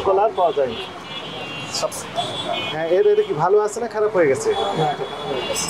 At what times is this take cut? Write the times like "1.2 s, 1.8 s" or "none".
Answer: 2.0 s